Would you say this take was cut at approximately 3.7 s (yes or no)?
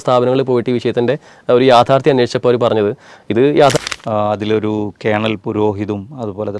yes